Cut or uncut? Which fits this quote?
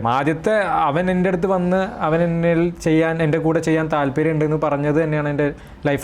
uncut